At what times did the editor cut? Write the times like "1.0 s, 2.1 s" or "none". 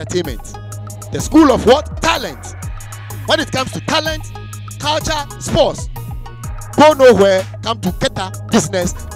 none